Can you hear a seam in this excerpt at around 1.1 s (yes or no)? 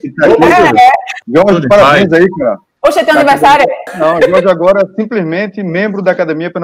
yes